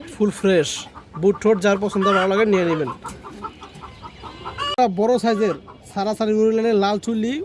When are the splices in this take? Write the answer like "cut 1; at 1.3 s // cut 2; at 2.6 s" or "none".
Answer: none